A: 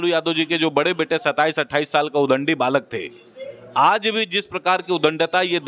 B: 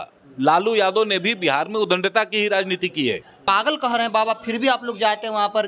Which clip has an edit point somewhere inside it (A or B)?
B